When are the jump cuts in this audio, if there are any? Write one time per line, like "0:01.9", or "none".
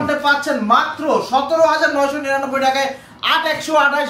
none